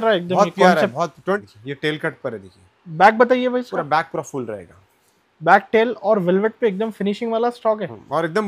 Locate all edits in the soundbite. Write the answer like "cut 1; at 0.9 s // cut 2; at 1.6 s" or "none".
cut 1; at 1.2 s